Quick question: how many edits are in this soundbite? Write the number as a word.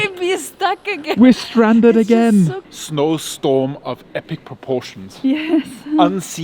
one